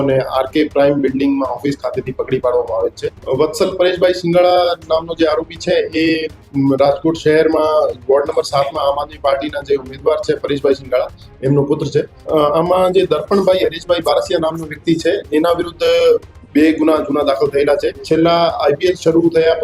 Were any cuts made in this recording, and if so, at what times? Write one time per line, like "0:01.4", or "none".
0:03.1
0:12.2
0:18.0